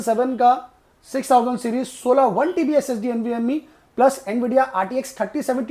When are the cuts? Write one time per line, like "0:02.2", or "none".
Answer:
none